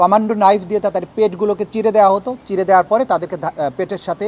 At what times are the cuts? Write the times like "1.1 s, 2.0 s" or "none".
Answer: none